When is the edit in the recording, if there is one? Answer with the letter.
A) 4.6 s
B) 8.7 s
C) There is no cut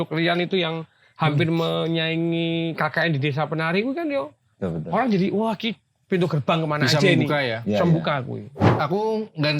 B